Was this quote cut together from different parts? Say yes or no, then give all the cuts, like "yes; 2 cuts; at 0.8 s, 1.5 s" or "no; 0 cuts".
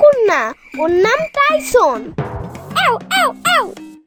no; 0 cuts